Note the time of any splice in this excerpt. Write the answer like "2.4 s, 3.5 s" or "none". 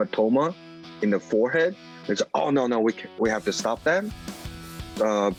none